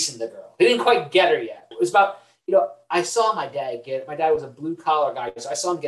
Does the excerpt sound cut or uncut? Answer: cut